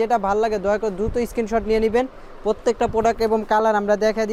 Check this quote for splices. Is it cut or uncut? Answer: uncut